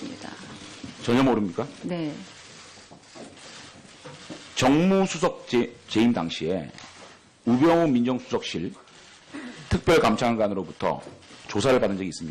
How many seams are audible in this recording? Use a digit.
1